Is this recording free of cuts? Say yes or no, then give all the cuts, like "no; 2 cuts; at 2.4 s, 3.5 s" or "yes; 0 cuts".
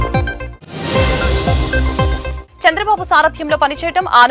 no; 1 cut; at 2.4 s